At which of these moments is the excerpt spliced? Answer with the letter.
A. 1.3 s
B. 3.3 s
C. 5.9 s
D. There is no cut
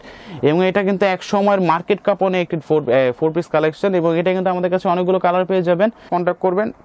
C